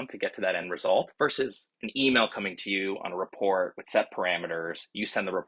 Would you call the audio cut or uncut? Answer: cut